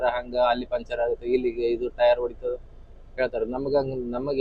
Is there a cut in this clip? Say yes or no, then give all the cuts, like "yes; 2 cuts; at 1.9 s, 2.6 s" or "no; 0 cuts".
no; 0 cuts